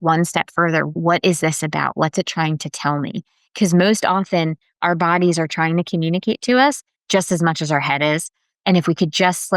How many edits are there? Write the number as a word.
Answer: one